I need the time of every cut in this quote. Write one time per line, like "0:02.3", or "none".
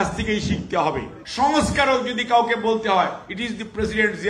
0:01.2